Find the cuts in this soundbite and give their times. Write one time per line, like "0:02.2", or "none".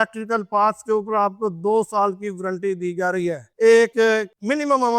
0:03.5